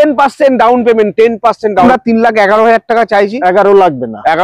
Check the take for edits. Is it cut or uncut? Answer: cut